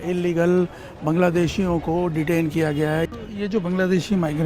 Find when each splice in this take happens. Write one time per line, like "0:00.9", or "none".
0:03.1